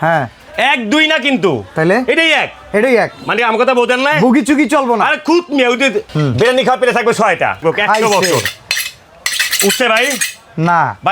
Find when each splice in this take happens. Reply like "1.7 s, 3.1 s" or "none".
6.1 s, 7.6 s